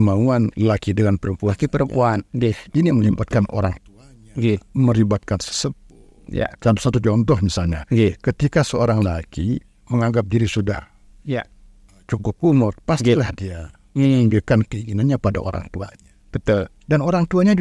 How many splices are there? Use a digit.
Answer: 0